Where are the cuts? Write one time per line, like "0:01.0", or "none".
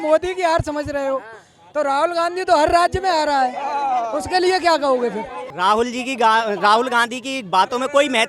none